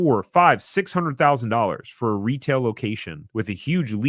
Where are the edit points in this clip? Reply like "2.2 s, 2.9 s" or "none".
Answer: 3.1 s